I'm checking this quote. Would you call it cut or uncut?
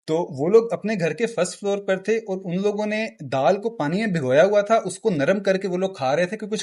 uncut